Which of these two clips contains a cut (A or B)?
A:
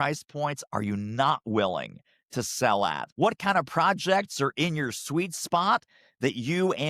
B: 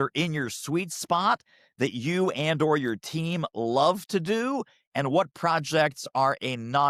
A